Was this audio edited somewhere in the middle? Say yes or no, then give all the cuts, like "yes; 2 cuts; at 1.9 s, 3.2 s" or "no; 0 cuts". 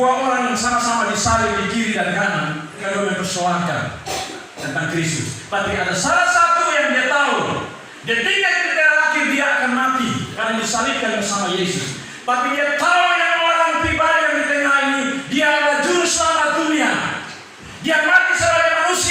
yes; 2 cuts; at 2.8 s, 10.3 s